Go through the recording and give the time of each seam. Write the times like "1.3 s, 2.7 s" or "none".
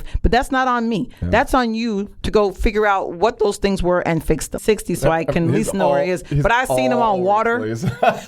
4.6 s